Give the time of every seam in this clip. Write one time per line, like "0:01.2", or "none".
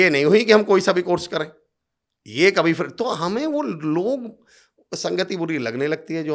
none